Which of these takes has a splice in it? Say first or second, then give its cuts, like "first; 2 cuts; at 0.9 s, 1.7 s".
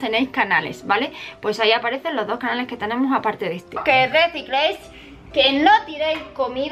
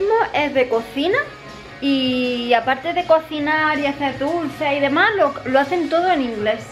first; 1 cut; at 3.8 s